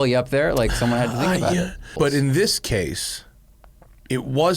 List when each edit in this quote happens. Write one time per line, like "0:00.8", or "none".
0:01.9